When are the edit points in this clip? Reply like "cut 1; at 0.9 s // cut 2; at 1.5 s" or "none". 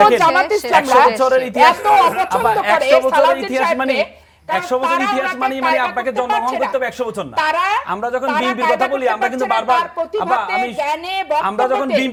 none